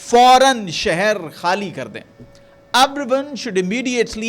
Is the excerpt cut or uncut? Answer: uncut